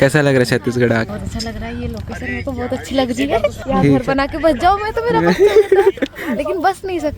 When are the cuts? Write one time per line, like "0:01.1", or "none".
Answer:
0:01.1
0:03.6